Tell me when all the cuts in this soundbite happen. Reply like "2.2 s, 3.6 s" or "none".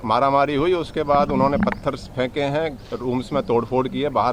none